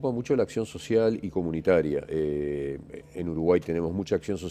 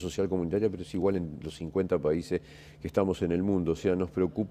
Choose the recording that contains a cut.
first; 1 cut; at 1.1 s

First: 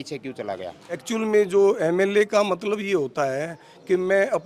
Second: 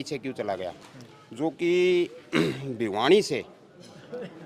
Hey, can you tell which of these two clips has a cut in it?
first; 1 cut; at 1.0 s

